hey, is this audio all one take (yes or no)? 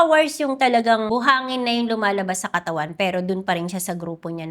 no